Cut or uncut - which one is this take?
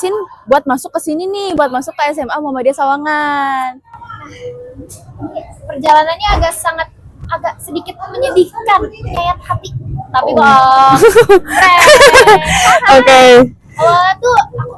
uncut